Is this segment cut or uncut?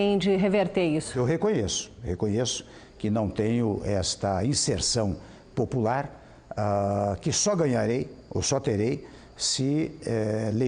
cut